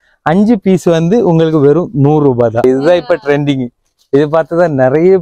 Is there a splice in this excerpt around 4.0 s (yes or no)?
no